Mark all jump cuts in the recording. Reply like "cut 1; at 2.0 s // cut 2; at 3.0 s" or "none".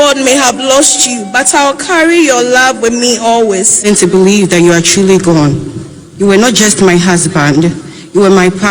cut 1; at 3.9 s

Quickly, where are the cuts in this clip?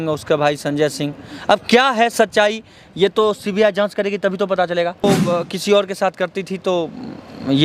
cut 1; at 5.0 s

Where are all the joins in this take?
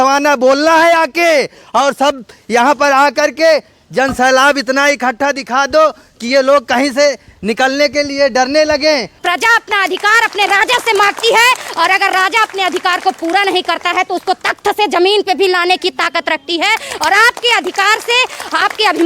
cut 1; at 9.2 s

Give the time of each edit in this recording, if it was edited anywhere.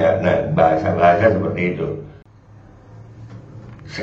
cut 1; at 2.2 s

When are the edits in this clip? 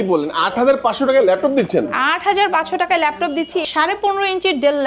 cut 1; at 3.7 s

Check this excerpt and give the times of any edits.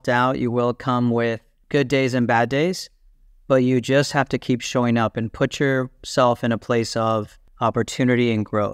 cut 1; at 1.5 s // cut 2; at 7.4 s

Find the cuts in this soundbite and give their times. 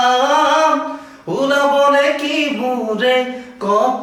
none

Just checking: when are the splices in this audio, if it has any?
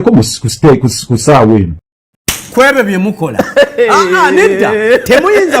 cut 1; at 1.8 s

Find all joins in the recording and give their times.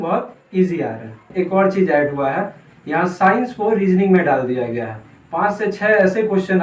cut 1; at 1.3 s

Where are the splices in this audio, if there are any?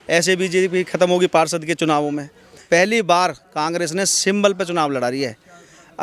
cut 1; at 2.6 s

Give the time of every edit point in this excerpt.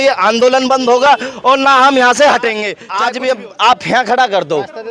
cut 1; at 2.7 s

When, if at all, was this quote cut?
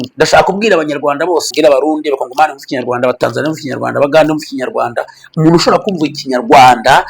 cut 1; at 1.5 s

